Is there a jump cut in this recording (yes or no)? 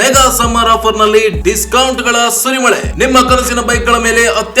no